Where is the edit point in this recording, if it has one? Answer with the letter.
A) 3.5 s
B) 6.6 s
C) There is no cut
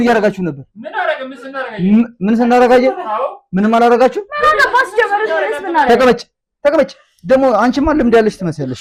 C